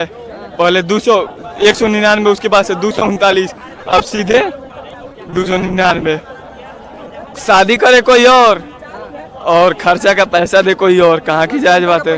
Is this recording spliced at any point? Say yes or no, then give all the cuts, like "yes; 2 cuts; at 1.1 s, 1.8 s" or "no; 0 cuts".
no; 0 cuts